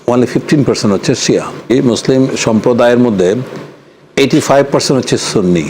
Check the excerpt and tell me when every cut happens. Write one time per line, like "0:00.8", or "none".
0:01.7